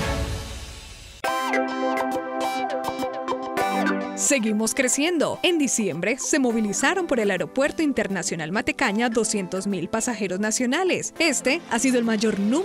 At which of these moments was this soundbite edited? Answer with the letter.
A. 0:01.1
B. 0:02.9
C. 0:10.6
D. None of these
A